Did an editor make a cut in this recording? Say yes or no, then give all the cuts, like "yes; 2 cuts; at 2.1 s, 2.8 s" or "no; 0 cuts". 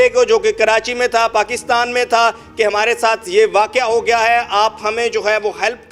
no; 0 cuts